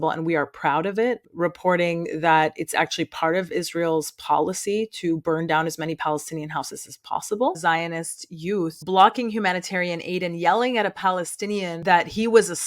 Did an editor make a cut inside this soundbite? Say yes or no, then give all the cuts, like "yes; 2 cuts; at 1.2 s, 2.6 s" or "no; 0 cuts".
yes; 4 cuts; at 1.2 s, 7.6 s, 8.8 s, 11.7 s